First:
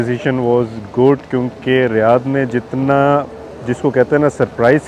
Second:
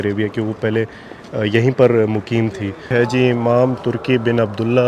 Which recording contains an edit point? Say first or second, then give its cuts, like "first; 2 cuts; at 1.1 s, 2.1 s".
second; 1 cut; at 2.9 s